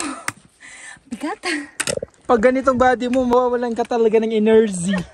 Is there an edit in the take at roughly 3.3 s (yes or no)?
yes